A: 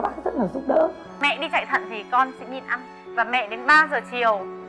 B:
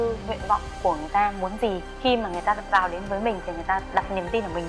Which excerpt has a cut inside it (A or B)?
A